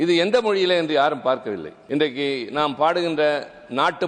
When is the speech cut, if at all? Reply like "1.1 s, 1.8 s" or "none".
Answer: 1.7 s